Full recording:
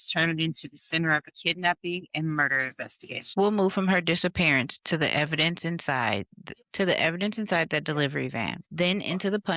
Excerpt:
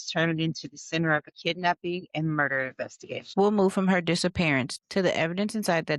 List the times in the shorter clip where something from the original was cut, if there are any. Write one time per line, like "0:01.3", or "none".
0:04.8